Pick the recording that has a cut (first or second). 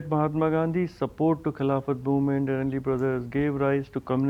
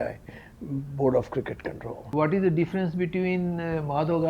second